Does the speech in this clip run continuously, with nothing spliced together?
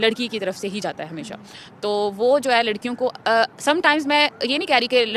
yes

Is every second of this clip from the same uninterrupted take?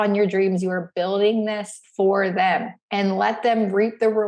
no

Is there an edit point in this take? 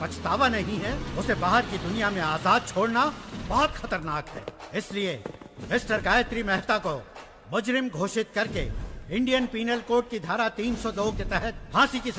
no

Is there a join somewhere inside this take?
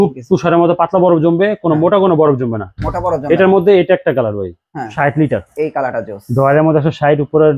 yes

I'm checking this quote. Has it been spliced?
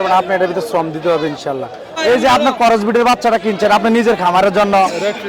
yes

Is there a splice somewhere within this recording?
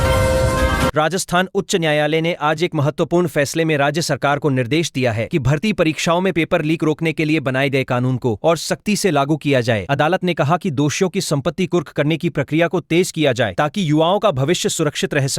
yes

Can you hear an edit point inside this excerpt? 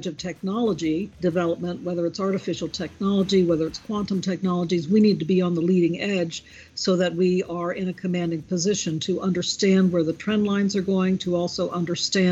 yes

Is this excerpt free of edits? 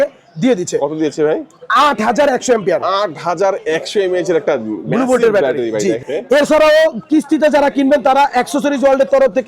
no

